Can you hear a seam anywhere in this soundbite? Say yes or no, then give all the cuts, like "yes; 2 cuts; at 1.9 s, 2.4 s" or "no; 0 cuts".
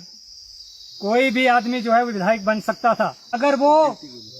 yes; 1 cut; at 3.3 s